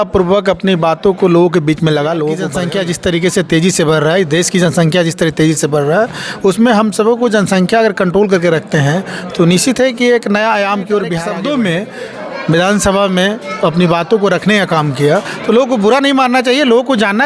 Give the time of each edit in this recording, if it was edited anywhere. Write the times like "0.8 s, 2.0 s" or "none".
2.5 s, 11.3 s